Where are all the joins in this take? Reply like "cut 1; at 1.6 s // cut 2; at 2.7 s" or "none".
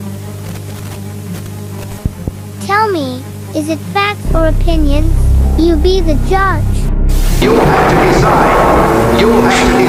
none